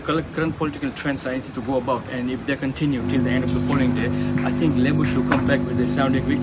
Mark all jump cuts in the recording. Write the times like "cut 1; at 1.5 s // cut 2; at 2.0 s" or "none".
none